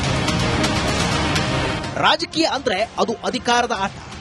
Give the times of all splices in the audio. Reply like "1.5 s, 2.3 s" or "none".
1.5 s